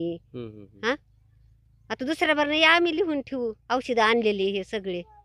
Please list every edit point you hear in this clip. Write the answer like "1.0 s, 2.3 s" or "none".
none